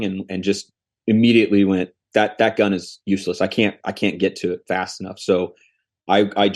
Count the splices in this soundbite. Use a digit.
0